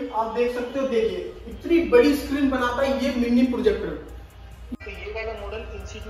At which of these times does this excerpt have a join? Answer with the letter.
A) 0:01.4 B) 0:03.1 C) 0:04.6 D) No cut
C